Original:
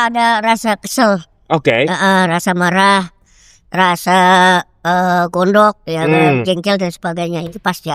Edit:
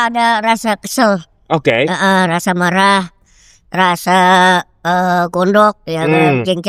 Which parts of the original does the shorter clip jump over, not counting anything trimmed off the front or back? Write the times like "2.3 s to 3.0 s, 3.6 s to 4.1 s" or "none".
none